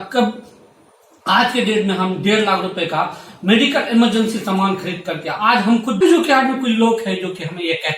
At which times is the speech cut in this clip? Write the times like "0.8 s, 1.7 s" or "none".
6.0 s